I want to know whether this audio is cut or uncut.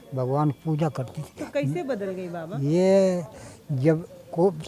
uncut